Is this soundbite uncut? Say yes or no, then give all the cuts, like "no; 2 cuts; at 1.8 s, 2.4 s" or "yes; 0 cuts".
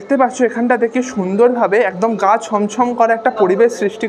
yes; 0 cuts